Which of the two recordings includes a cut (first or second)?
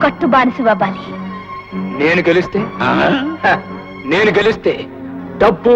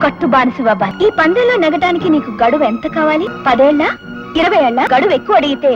second